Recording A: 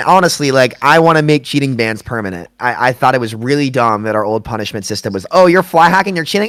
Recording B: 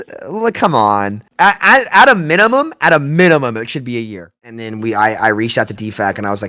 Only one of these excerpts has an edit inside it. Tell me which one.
B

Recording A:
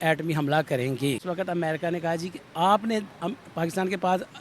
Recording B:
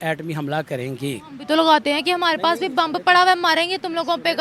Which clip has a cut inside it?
A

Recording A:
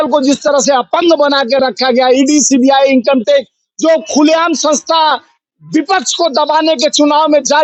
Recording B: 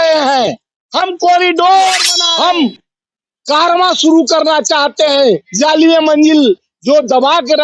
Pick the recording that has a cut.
B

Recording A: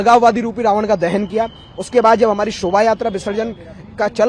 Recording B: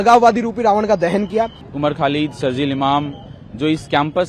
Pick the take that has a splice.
B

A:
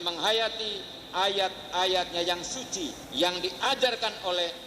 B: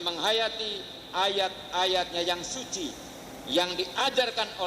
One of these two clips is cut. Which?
A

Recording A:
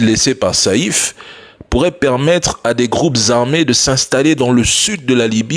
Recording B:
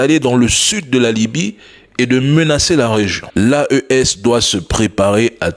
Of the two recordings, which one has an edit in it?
B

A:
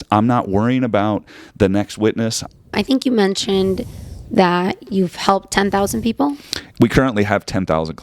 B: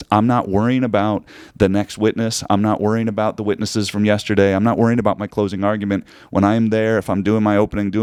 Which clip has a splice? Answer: A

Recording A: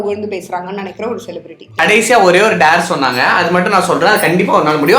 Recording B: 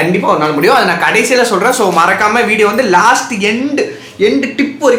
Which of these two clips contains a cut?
A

